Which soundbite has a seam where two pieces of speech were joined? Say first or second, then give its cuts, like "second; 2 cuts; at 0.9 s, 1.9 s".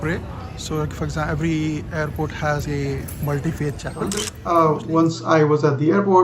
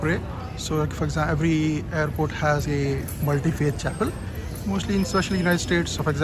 first; 1 cut; at 4.3 s